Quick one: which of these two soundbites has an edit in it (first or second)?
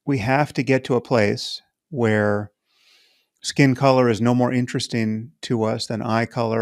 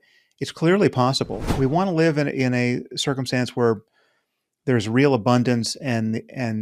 second